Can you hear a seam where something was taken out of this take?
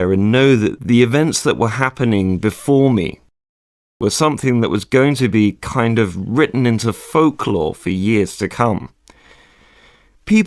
no; 0 cuts

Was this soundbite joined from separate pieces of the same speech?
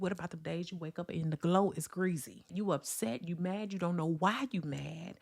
yes; 1 cut; at 2.5 s

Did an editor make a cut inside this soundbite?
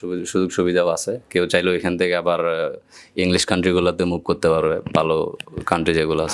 no; 0 cuts

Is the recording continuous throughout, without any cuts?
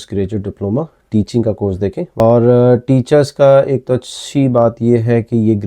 no; 1 cut; at 2.2 s

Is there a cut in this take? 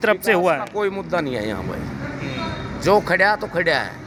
no; 0 cuts

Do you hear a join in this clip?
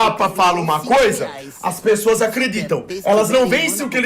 yes; 1 cut; at 2.9 s

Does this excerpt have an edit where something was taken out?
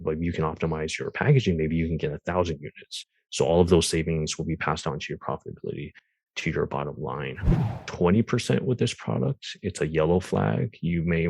yes; 1 cut; at 7.6 s

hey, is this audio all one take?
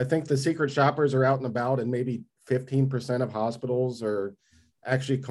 yes; 0 cuts

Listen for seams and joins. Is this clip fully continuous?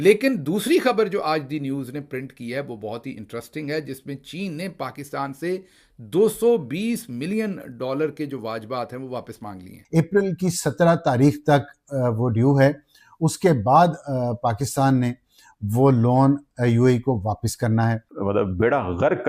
no; 2 cuts; at 9.7 s, 18.1 s

